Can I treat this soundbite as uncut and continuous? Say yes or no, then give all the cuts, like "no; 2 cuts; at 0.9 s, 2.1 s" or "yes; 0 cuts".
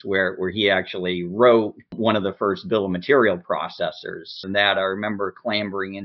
no; 2 cuts; at 1.9 s, 4.4 s